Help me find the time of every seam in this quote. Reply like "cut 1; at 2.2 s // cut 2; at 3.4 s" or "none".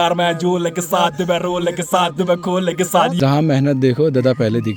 cut 1; at 3.2 s

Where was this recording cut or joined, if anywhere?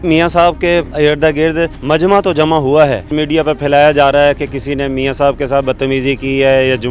cut 1; at 0.9 s // cut 2; at 1.8 s // cut 3; at 3.1 s

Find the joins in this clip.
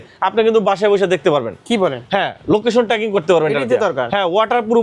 none

